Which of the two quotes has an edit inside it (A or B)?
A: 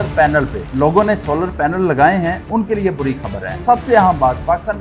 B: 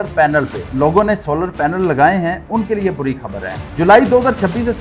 A